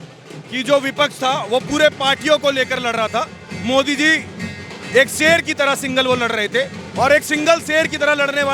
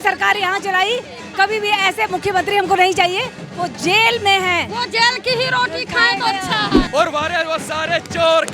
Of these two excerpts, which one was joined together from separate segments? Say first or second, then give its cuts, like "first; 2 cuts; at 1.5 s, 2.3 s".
second; 1 cut; at 6.8 s